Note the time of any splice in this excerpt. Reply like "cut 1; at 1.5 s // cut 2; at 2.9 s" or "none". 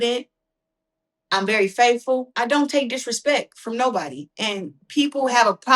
cut 1; at 2.3 s